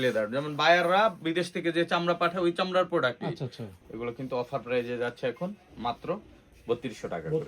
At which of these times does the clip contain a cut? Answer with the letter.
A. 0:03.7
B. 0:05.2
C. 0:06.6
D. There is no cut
A